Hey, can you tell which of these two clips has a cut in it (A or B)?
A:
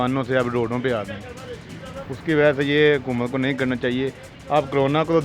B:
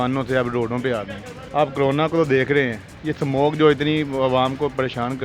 B